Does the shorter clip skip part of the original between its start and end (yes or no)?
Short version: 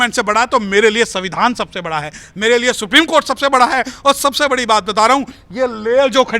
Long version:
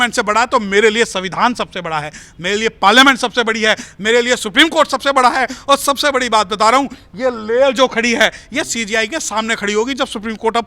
yes